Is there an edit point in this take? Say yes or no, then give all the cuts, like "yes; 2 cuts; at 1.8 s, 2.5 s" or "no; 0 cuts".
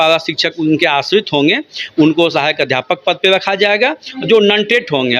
no; 0 cuts